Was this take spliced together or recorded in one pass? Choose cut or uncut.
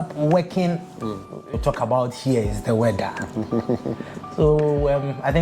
cut